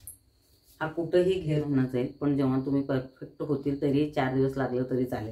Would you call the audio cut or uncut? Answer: cut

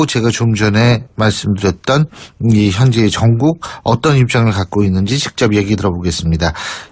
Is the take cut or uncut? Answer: cut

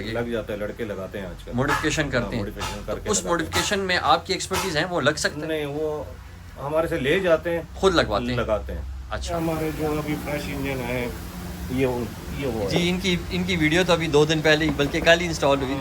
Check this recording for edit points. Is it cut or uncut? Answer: cut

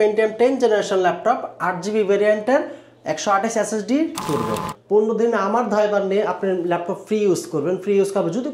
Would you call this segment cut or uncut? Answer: cut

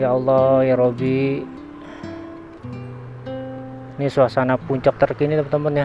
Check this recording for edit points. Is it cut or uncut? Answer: cut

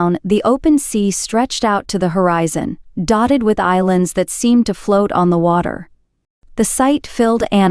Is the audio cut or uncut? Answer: uncut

